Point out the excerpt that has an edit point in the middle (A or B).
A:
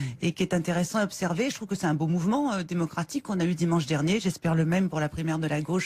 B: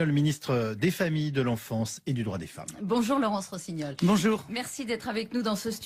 A